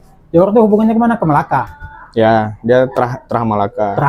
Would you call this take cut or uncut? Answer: uncut